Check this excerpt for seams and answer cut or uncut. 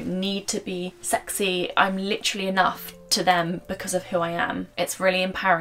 cut